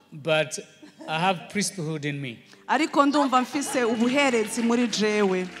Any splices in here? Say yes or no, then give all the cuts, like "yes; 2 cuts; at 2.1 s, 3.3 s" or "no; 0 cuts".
no; 0 cuts